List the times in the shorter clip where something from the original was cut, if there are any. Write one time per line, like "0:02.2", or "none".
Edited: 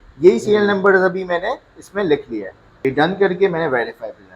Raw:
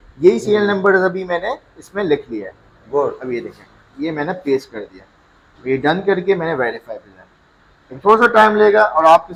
0:02.8